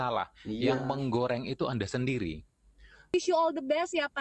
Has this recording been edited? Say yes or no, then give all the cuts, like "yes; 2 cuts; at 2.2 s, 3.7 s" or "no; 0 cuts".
yes; 1 cut; at 3.1 s